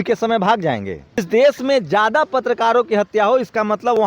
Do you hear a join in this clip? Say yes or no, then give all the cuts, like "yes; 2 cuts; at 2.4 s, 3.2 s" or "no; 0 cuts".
yes; 1 cut; at 1.2 s